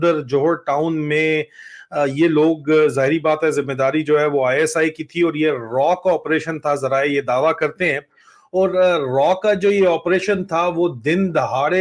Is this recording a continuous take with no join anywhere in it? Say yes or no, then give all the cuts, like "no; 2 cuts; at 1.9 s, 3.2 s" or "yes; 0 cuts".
yes; 0 cuts